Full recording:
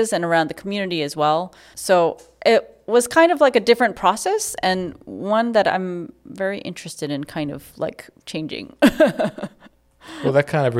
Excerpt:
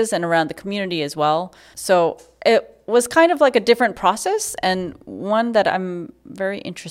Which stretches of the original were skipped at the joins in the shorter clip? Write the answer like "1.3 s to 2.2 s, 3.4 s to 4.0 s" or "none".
none